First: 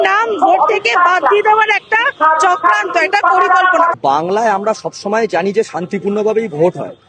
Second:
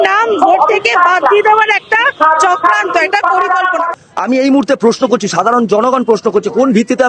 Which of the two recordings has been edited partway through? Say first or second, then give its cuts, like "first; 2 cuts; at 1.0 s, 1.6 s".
second; 1 cut; at 3.9 s